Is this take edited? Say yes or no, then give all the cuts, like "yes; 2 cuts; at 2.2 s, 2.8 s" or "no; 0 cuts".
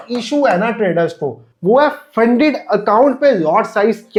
no; 0 cuts